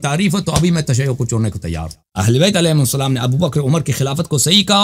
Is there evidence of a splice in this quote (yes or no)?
no